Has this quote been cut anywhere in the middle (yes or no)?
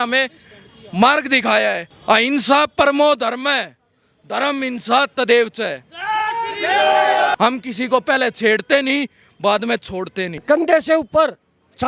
yes